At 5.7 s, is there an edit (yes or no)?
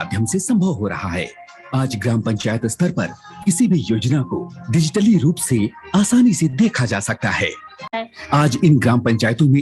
no